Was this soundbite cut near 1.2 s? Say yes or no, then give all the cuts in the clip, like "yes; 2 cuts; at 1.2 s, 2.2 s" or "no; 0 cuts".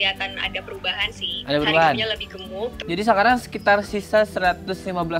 no; 1 cut; at 2.8 s